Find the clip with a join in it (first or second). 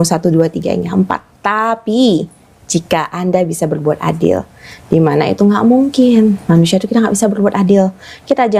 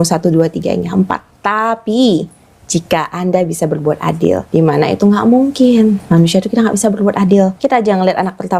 second